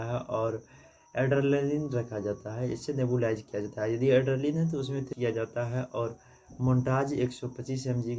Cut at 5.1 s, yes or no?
yes